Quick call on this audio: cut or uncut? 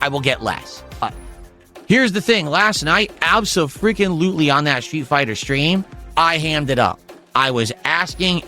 cut